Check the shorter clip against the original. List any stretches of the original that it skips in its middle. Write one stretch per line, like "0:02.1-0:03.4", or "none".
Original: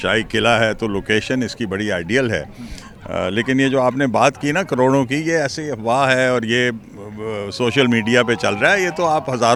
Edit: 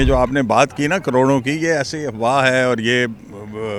none